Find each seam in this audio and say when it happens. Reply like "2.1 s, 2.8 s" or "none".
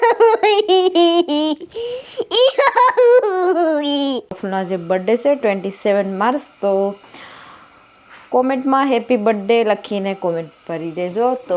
4.4 s